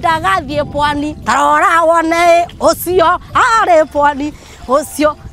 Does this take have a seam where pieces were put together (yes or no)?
no